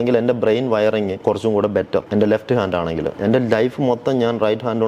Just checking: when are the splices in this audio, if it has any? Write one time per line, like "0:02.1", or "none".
0:01.2
0:02.1
0:03.1